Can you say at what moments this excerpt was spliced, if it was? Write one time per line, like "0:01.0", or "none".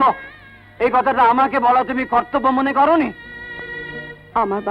none